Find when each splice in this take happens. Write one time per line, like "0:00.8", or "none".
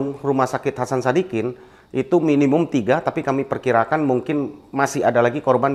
none